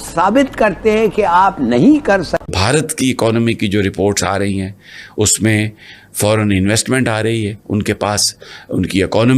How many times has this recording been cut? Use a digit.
1